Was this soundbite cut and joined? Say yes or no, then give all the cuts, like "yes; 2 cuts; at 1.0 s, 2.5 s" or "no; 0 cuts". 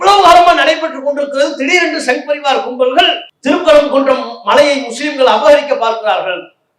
yes; 1 cut; at 3.3 s